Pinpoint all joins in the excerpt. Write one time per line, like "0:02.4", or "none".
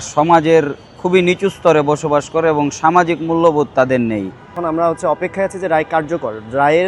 0:04.5